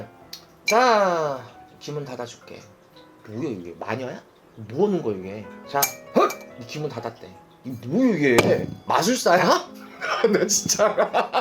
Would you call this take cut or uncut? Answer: uncut